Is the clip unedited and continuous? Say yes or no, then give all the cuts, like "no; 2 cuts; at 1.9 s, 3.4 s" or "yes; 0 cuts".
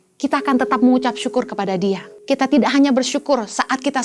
no; 1 cut; at 2.1 s